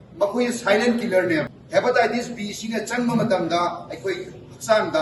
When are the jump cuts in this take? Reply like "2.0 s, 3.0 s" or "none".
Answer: none